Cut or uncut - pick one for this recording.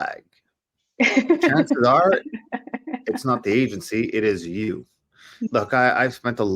cut